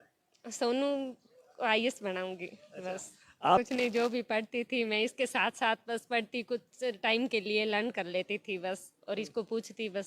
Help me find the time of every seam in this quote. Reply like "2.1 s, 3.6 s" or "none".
3.6 s